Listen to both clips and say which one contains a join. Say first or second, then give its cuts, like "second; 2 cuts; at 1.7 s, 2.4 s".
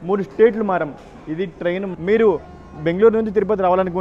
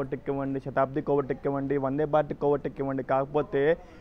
first; 1 cut; at 1.9 s